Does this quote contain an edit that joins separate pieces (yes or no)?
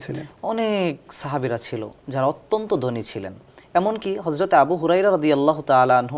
no